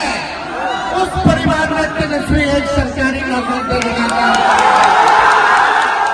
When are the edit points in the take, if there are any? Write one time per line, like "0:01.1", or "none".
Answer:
none